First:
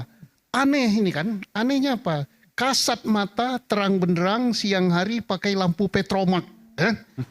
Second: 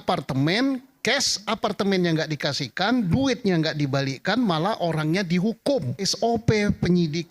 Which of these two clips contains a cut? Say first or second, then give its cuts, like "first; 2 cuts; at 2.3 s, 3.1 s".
second; 1 cut; at 6.1 s